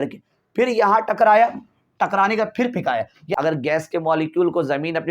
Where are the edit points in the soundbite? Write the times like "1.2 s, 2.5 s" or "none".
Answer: 3.2 s

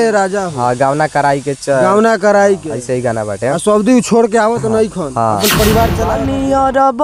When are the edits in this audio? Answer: 6.1 s

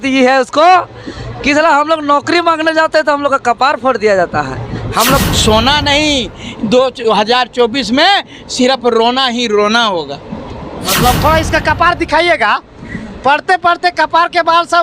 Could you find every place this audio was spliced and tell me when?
5.2 s, 11.2 s

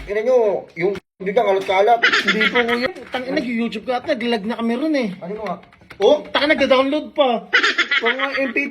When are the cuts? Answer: 2.9 s

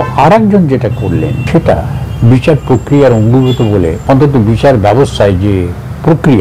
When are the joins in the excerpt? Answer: 1.4 s, 4.0 s

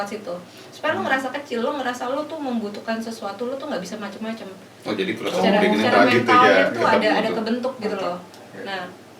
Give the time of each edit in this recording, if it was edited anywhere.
none

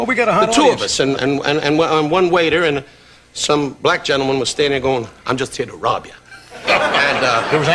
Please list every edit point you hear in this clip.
5.8 s

